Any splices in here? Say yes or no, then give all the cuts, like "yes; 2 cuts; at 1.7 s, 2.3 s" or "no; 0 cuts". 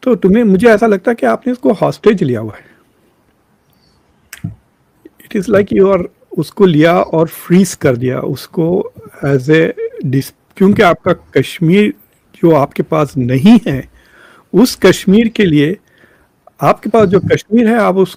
no; 0 cuts